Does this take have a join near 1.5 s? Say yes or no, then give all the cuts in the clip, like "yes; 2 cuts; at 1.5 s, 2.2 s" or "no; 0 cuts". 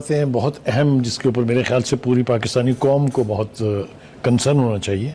no; 0 cuts